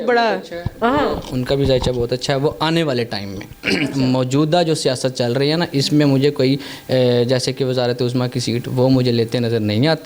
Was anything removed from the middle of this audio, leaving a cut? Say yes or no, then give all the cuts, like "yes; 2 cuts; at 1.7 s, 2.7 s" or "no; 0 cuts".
no; 0 cuts